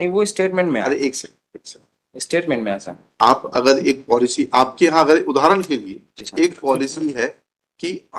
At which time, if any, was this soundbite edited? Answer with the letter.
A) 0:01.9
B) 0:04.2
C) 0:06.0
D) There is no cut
D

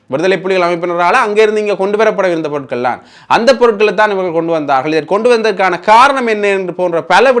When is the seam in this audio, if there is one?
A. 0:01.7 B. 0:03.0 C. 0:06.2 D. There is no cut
D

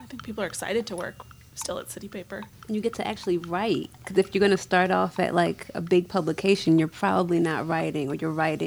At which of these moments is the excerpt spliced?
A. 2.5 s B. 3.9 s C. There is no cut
A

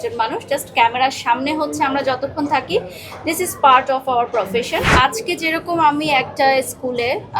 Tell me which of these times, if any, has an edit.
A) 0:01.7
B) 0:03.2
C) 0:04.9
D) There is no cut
C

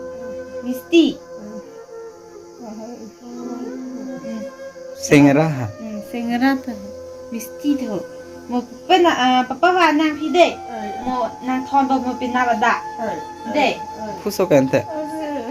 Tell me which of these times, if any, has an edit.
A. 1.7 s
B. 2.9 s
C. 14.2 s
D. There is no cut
C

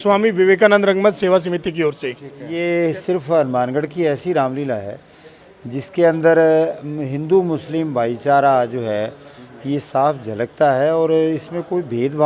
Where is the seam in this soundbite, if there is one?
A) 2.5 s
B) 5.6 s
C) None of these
A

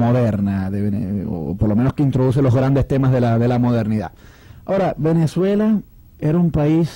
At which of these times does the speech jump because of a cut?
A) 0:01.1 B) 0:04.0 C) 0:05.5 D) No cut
B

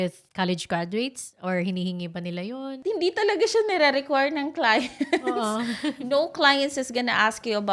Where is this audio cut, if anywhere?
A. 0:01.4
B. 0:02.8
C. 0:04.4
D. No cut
B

